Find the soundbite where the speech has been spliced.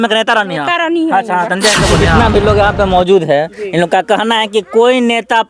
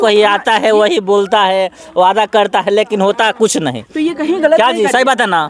first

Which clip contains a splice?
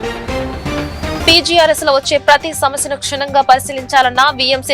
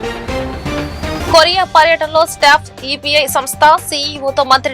first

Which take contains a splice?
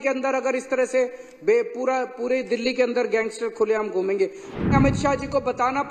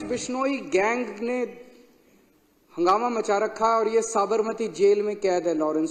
first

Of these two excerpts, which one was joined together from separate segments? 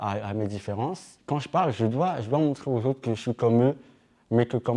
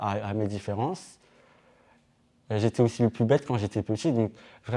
first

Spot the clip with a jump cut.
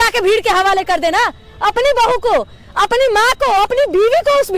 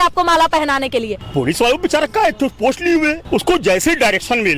second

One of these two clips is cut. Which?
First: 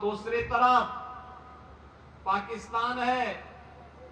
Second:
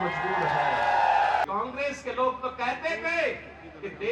second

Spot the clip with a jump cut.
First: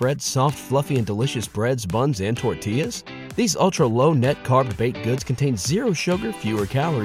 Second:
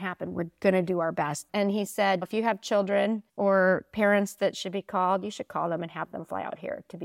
second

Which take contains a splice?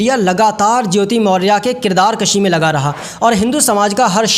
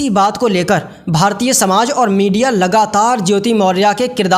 first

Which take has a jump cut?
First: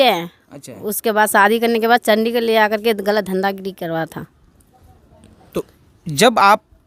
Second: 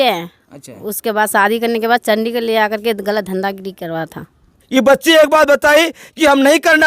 second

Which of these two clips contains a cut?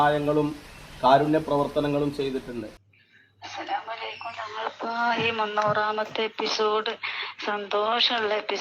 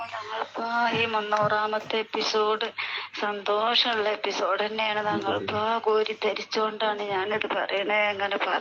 first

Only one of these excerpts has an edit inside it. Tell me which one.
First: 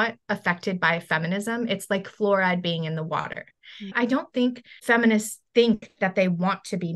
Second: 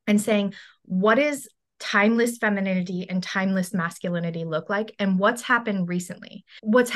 first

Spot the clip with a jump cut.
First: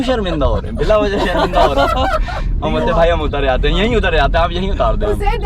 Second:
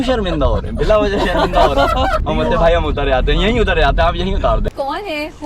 second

